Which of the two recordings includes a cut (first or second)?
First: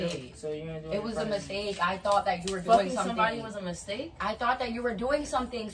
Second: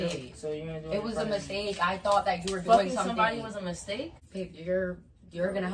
second